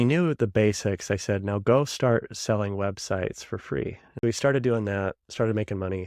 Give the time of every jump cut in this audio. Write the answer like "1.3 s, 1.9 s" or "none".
4.1 s